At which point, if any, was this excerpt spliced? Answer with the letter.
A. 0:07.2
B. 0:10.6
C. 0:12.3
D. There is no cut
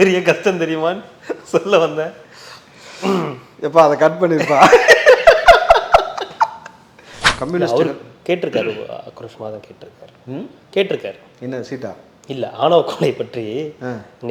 A